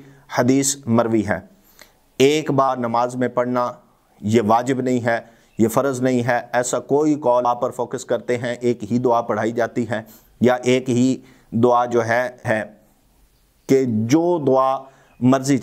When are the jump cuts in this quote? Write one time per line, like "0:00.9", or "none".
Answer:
0:02.7
0:07.5
0:12.4